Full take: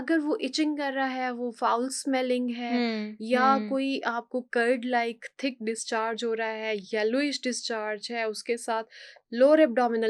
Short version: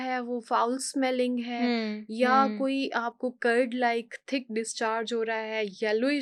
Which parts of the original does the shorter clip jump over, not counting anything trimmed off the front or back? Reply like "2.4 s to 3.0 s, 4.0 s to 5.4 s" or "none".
none